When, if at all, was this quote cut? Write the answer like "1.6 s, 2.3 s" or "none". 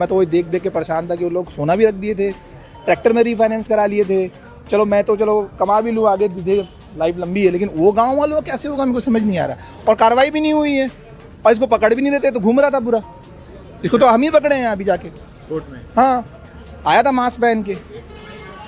none

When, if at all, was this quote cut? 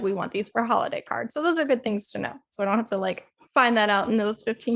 none

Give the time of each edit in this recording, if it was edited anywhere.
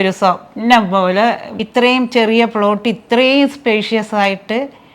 1.6 s

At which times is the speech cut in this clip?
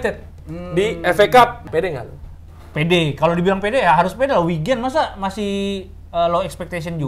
1.6 s

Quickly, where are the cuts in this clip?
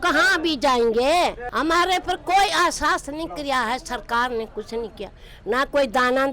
1.4 s

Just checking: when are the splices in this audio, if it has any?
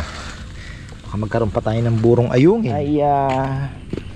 2.8 s

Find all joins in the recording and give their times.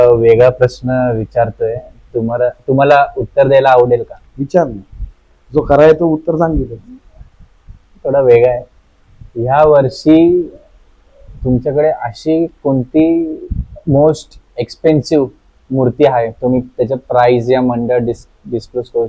none

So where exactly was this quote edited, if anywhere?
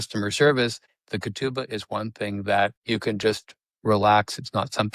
0.9 s, 2.8 s

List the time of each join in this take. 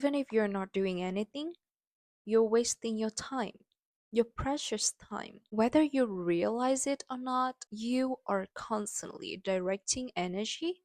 none

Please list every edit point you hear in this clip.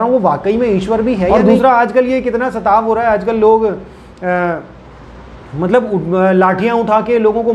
1.3 s

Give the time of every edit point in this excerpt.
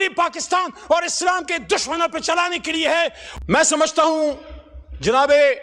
3.2 s

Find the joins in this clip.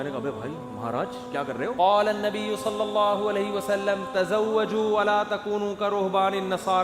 1.7 s

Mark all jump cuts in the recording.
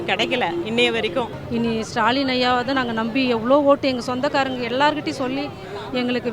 1.4 s

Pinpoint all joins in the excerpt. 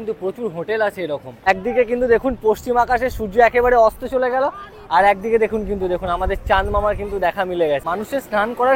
1.5 s, 7.9 s

